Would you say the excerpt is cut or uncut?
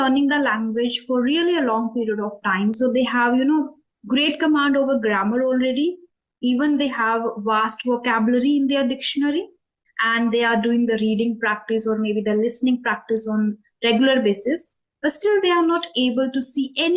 uncut